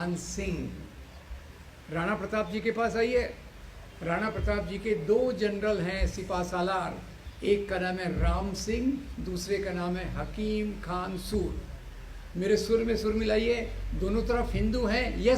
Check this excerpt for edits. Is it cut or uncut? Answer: uncut